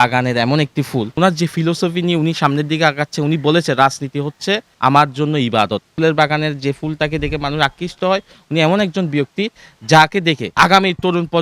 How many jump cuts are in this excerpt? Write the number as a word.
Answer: four